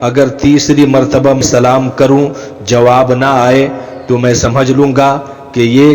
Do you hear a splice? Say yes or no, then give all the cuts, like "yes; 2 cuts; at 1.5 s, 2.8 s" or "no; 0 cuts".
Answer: yes; 1 cut; at 1.4 s